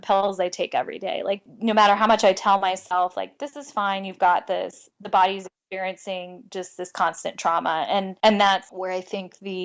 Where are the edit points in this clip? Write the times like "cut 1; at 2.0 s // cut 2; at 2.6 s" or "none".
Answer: cut 1; at 1.4 s // cut 2; at 8.1 s // cut 3; at 8.7 s